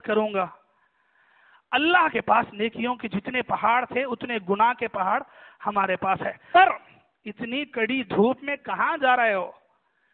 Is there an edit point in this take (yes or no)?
yes